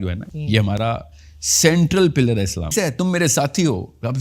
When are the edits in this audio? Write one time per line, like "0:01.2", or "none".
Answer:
0:02.7